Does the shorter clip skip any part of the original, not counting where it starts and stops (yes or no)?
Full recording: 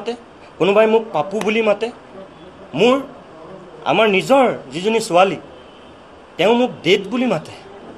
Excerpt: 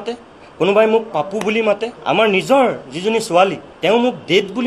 yes